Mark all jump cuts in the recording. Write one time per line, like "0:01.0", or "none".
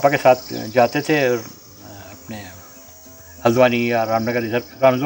none